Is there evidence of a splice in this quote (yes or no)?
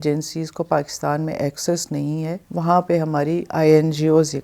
no